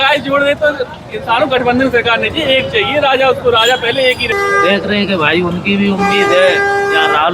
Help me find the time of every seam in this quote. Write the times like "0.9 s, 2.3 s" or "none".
4.3 s